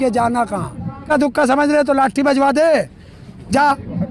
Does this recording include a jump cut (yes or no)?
yes